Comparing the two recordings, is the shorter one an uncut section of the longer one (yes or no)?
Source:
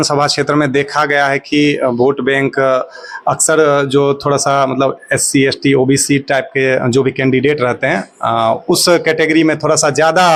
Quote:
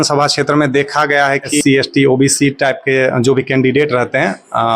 no